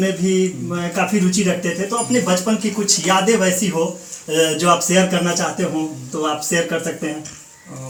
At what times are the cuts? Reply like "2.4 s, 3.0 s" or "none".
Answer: none